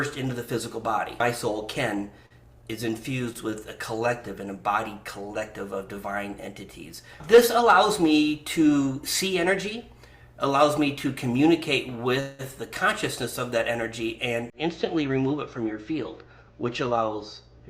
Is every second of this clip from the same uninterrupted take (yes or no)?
no